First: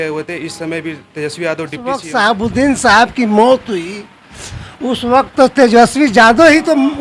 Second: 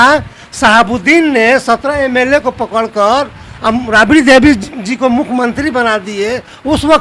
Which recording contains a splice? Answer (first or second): first